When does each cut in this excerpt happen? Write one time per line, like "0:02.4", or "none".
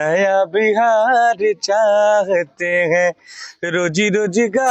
none